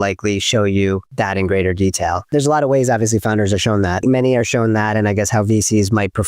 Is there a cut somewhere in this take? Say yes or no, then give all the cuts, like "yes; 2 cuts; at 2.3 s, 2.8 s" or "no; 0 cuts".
yes; 3 cuts; at 1.1 s, 2.3 s, 4.0 s